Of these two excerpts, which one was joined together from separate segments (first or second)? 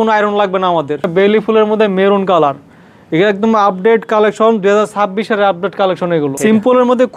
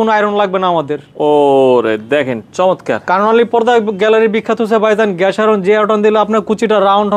first